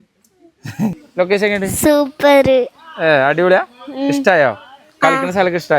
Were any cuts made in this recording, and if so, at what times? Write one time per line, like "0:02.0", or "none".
0:01.0